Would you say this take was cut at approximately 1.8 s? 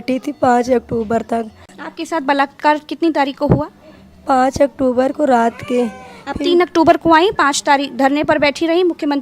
yes; 1 cut; at 1.8 s

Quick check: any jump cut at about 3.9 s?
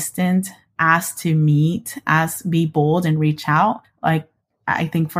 no; 0 cuts

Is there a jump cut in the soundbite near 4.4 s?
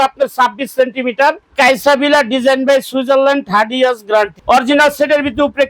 yes; 2 cuts; at 1.4 s, 4.4 s

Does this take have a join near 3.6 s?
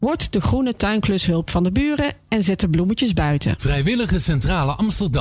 yes; 1 cut; at 3.6 s

